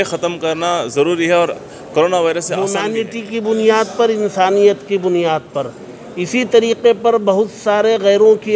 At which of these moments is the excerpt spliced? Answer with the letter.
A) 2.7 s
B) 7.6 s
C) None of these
A